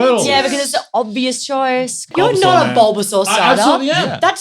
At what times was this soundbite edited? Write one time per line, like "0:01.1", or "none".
0:02.1